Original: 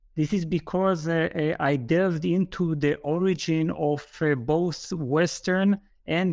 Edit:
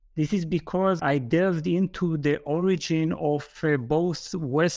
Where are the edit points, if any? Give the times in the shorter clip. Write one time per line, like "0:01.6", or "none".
0:01.0